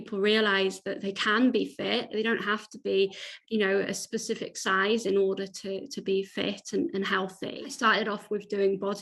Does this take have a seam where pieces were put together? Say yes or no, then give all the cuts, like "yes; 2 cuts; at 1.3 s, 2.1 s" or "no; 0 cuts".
yes; 1 cut; at 7.4 s